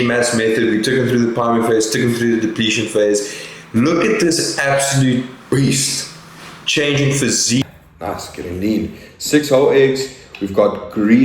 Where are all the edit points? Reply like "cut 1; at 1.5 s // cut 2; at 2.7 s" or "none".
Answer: cut 1; at 7.6 s